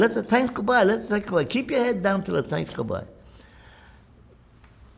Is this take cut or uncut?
uncut